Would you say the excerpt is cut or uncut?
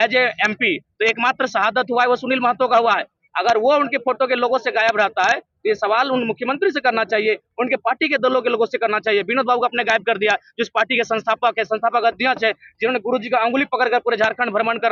uncut